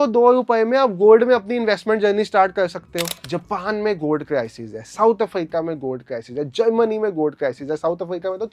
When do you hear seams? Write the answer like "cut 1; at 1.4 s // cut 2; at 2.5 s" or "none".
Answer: cut 1; at 3.0 s